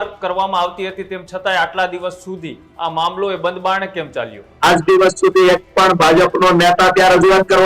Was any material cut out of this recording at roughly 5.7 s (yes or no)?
no